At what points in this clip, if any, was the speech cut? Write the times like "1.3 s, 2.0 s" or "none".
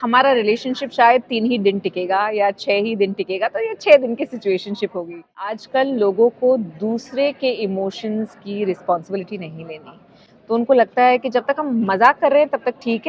5.6 s